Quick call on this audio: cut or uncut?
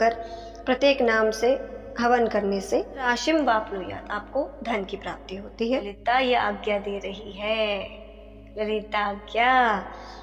cut